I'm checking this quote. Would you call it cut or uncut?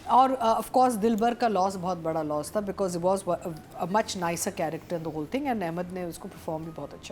uncut